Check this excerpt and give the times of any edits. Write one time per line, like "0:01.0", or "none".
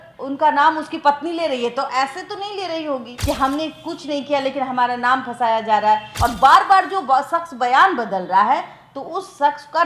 0:03.1
0:06.1